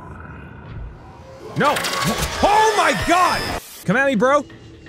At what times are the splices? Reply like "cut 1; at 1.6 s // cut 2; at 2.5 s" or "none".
cut 1; at 3.6 s